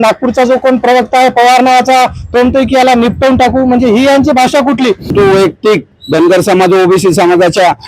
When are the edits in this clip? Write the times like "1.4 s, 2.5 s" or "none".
5.1 s